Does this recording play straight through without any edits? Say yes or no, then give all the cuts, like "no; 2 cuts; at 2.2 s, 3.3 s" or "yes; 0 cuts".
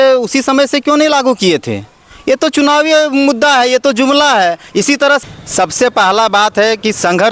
no; 1 cut; at 5.2 s